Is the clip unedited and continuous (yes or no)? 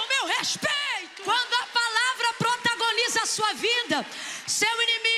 no